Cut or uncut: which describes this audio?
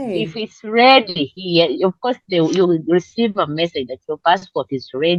uncut